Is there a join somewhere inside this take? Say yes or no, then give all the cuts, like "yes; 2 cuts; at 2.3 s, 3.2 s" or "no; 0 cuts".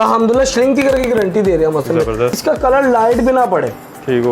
yes; 1 cut; at 2.4 s